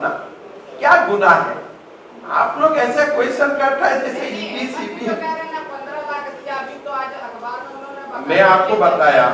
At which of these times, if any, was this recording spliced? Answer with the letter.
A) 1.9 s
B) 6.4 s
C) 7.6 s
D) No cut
D